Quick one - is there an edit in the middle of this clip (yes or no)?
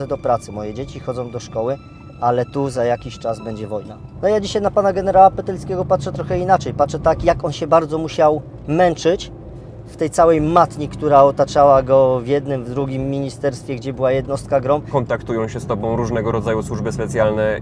yes